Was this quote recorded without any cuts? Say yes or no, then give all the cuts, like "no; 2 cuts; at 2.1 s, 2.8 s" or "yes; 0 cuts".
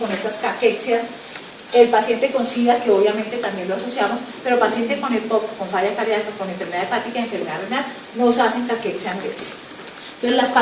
no; 1 cut; at 6.7 s